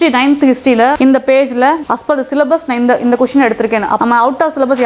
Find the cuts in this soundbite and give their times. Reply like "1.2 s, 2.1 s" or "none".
1.0 s, 1.9 s, 4.0 s